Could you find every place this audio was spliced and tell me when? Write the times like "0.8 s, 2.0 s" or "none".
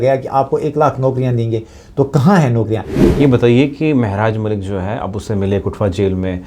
3.0 s